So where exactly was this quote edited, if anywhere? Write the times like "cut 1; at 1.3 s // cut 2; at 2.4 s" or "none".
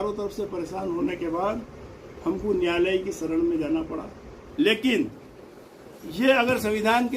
cut 1; at 4.4 s